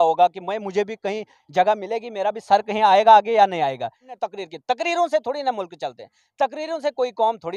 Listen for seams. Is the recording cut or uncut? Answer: cut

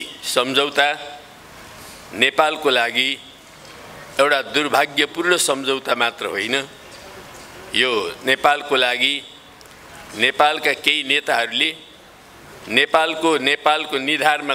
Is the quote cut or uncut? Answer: uncut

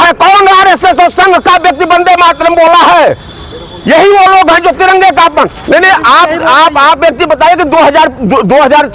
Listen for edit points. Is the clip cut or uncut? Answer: cut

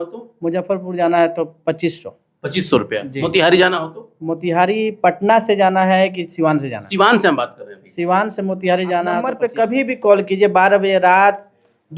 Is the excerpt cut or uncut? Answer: cut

